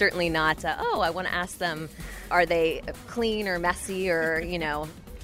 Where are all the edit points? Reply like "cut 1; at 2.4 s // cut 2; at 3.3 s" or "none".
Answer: cut 1; at 2.2 s